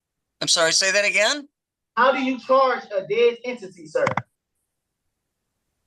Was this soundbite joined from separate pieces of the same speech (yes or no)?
no